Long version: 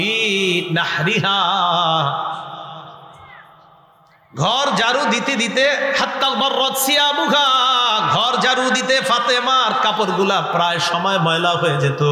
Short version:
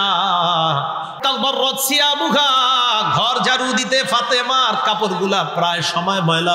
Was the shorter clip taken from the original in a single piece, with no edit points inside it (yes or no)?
no